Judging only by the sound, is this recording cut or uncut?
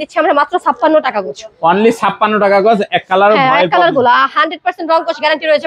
uncut